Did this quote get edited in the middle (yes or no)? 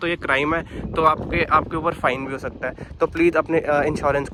no